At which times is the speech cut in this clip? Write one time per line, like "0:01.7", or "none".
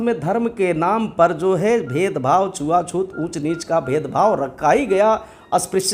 none